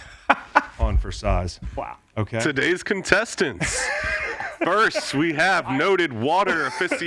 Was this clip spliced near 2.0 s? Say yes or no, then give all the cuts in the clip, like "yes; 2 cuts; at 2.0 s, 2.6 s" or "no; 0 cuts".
yes; 1 cut; at 2.0 s